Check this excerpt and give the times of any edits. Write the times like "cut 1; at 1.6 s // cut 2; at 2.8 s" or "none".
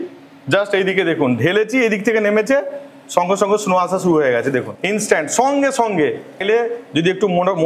cut 1; at 4.8 s // cut 2; at 6.4 s